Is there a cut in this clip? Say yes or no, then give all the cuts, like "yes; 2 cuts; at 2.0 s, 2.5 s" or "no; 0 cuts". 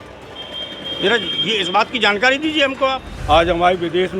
yes; 1 cut; at 3.1 s